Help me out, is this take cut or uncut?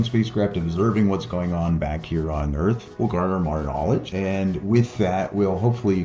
cut